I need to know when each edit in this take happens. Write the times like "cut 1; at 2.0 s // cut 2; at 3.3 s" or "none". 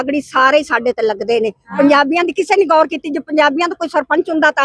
none